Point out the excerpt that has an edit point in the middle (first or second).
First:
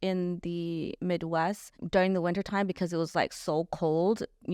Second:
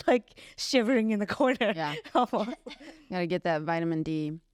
first